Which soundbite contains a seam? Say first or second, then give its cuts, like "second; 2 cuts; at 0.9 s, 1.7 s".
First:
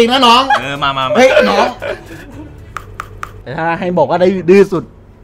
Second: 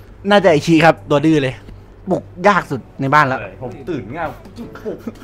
first; 1 cut; at 3.3 s